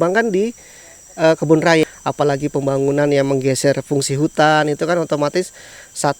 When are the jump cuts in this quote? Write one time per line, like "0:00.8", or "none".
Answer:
0:01.8